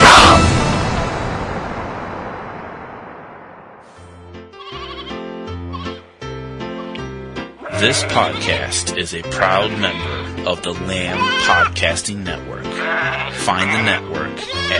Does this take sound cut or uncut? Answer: cut